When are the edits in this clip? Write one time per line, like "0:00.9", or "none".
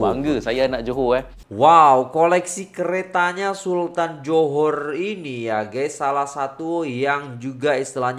0:01.4